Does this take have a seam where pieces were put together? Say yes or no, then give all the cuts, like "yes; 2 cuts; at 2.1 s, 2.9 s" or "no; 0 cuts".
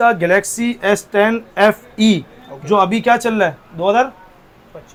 no; 0 cuts